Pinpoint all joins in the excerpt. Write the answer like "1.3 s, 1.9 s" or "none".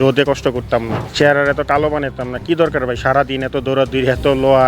1.0 s